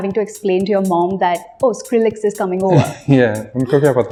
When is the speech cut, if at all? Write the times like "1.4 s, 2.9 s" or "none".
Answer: none